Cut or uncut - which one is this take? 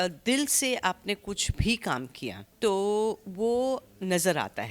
cut